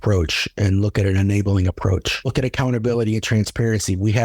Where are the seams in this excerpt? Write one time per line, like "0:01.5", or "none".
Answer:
0:02.3

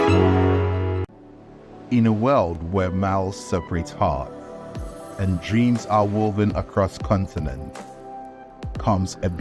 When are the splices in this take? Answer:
0:01.1

